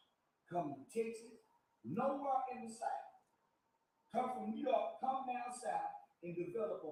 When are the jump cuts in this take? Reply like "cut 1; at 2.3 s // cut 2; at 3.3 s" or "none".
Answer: none